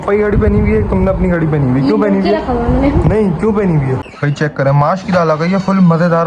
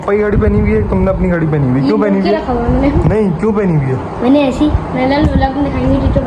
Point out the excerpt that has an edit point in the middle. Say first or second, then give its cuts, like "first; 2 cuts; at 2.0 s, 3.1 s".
first; 1 cut; at 4.1 s